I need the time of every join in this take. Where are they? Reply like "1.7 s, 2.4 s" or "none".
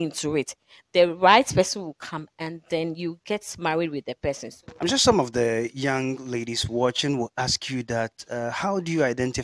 none